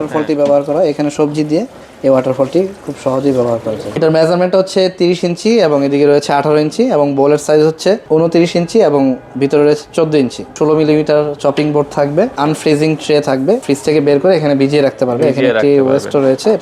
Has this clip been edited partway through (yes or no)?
yes